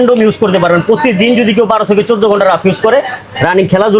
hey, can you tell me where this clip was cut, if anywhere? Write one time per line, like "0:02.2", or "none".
none